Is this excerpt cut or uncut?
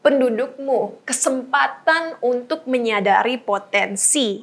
uncut